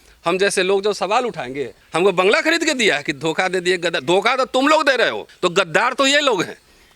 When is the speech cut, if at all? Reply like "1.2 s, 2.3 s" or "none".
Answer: 1.7 s, 5.2 s

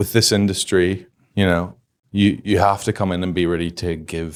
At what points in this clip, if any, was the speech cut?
none

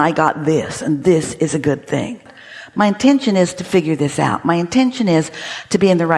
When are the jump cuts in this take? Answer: 2.4 s

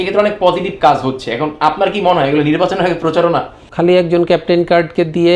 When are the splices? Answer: 3.6 s

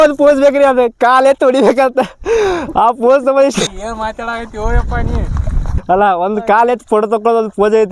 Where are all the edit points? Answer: 3.7 s, 5.7 s

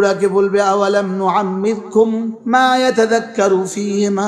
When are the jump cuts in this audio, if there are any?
2.4 s

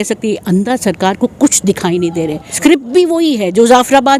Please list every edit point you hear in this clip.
2.4 s

